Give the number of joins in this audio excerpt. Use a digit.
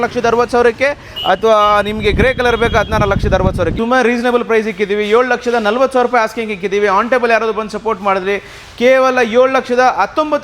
1